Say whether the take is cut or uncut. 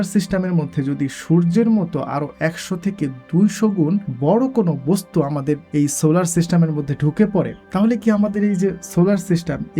cut